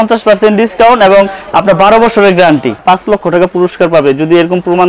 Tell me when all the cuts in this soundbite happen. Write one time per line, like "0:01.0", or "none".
0:02.8